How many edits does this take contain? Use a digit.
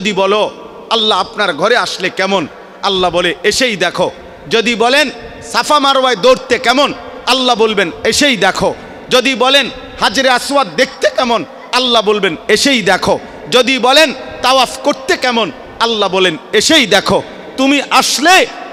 0